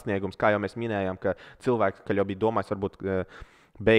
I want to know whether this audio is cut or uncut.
cut